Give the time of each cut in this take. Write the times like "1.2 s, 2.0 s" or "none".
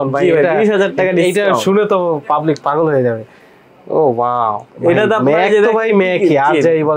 none